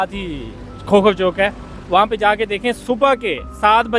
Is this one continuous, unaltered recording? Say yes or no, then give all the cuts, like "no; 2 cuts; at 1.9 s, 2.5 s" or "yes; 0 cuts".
yes; 0 cuts